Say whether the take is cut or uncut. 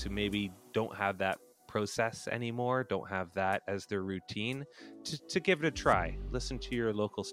uncut